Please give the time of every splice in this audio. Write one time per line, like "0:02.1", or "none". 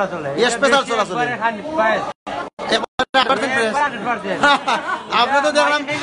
none